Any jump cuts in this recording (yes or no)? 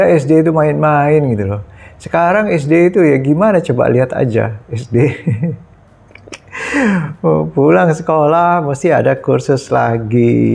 no